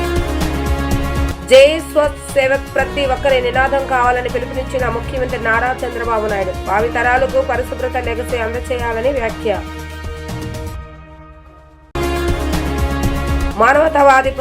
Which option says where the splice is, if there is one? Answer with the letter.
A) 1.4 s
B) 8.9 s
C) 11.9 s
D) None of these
A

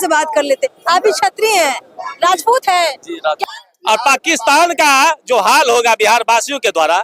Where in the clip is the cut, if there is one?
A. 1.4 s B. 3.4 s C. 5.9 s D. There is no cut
B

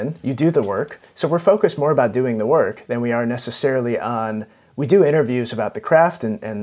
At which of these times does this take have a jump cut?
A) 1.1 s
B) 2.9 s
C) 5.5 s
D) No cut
D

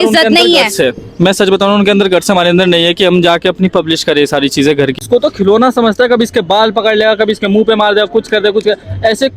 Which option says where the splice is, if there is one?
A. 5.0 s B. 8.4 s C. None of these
A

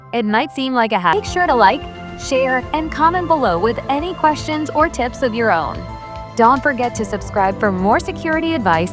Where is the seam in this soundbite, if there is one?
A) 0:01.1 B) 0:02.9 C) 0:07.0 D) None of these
A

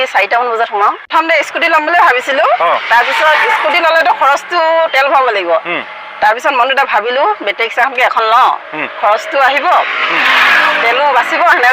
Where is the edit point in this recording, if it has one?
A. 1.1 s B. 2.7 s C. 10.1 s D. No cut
A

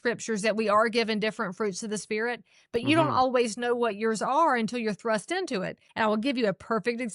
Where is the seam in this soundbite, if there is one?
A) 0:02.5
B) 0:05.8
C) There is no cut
B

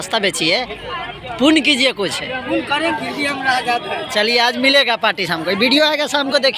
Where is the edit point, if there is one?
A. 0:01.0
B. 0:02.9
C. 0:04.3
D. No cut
B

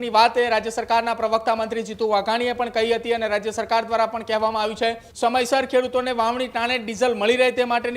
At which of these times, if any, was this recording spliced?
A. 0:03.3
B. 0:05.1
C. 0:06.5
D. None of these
B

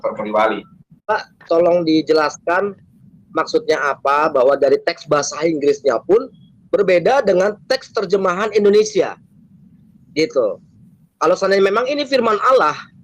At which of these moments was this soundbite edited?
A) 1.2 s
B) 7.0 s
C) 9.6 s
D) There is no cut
A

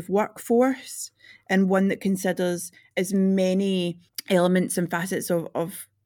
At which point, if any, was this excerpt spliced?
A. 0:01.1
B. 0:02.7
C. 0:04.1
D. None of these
D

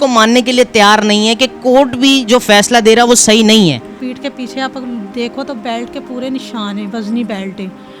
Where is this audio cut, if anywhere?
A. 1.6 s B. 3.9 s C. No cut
B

